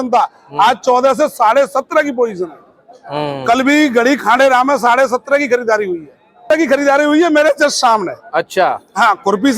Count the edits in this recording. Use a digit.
1